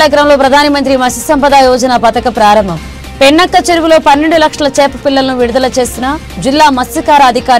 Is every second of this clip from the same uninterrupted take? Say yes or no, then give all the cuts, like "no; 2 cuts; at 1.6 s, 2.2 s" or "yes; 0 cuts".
yes; 0 cuts